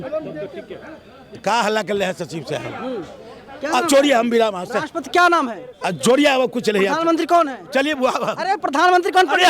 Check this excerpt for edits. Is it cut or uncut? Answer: uncut